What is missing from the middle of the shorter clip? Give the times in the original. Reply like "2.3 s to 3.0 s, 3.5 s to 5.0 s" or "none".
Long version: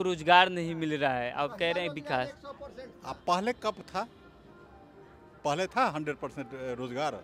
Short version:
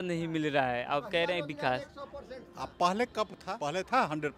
3.9 s to 5.3 s